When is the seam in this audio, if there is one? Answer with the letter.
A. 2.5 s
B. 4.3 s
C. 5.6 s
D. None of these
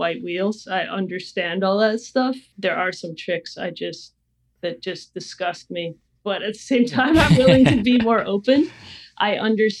A